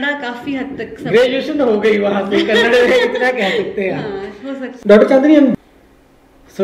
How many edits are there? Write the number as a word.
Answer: one